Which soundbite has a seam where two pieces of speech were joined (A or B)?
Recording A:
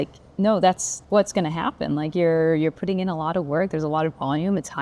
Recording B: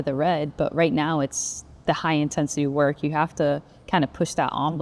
A